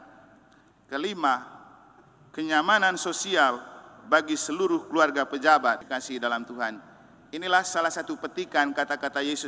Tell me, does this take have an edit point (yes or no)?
yes